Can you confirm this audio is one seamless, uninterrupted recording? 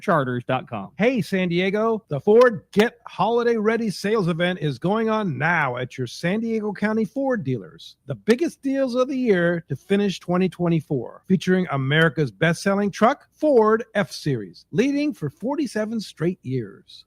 no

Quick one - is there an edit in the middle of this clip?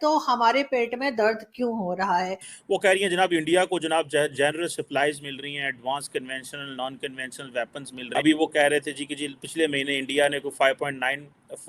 yes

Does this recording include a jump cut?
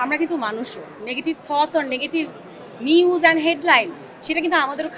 yes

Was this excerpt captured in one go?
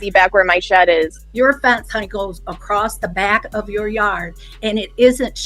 no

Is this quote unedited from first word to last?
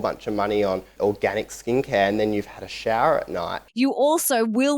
no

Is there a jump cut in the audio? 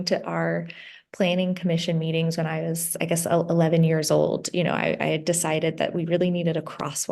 no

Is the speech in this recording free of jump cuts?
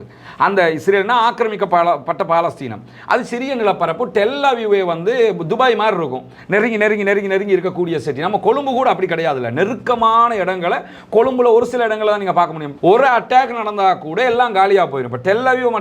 no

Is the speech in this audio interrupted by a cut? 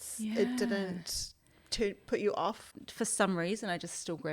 yes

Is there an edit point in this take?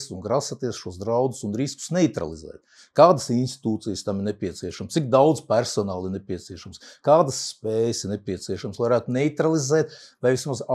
no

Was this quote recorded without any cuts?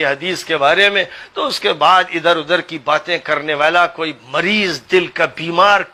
yes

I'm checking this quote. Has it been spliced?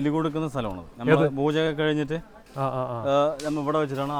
no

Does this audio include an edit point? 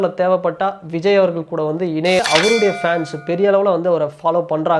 yes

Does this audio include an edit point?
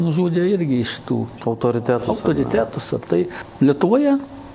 yes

